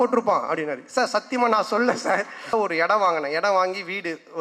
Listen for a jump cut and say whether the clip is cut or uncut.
cut